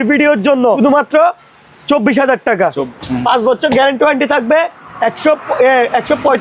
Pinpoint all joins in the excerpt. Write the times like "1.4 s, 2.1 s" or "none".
0.8 s, 2.9 s